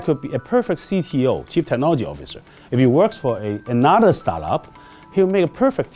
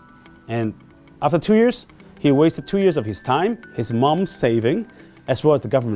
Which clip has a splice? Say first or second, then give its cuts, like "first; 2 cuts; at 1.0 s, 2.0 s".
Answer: second; 1 cut; at 3.7 s